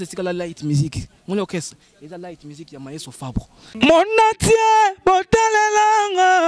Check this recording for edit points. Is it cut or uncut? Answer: cut